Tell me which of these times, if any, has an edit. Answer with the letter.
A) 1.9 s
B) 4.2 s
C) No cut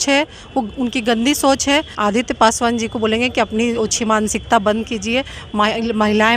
A